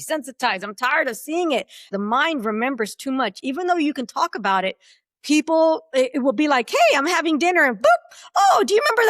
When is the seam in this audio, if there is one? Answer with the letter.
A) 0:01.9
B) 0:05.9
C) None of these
A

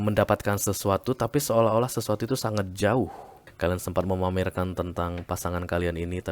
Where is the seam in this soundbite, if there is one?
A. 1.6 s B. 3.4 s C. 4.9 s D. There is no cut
B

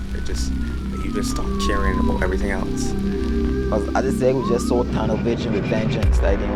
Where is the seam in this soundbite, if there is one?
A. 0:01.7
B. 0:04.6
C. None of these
C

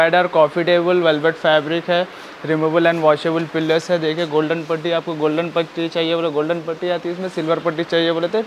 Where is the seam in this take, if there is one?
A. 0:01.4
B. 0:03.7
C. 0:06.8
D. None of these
D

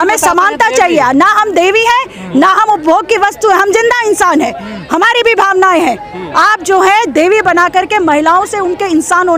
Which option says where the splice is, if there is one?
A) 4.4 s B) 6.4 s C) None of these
C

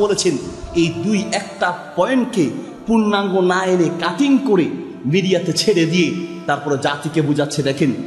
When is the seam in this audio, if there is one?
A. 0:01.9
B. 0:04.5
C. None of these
C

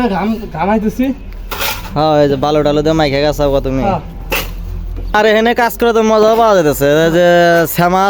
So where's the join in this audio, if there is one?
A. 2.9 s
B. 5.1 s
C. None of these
B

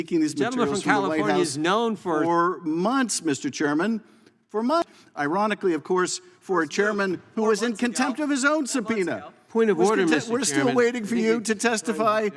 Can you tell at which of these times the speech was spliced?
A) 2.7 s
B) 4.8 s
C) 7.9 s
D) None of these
B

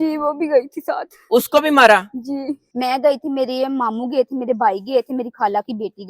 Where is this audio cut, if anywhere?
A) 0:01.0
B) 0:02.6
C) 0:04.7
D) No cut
B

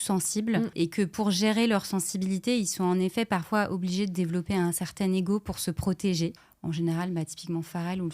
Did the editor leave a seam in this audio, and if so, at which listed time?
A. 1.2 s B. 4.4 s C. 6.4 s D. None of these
C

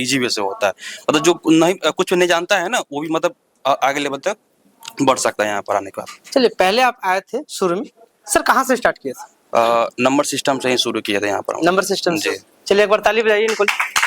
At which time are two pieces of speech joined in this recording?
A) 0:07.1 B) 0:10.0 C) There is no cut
C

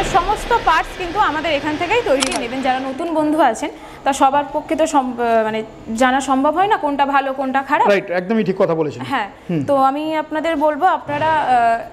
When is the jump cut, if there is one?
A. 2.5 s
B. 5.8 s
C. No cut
A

